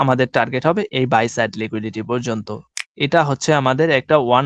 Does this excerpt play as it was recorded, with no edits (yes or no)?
no